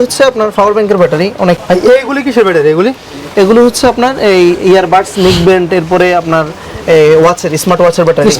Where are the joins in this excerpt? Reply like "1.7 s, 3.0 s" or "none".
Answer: 1.6 s

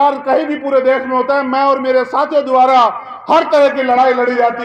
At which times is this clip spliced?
none

